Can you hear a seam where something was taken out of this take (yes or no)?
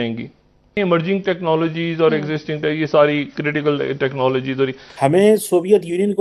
yes